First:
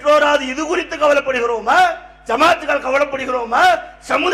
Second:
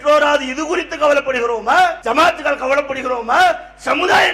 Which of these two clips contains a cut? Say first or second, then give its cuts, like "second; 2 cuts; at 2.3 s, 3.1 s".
second; 1 cut; at 2.0 s